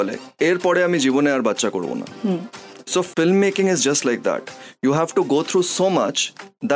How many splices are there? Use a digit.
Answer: 0